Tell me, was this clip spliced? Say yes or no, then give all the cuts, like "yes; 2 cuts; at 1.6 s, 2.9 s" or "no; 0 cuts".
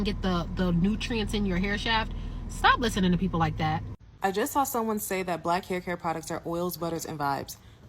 yes; 1 cut; at 4.1 s